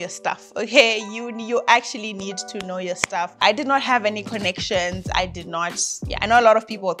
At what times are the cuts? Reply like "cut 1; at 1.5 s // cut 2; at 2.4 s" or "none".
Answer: cut 1; at 3.4 s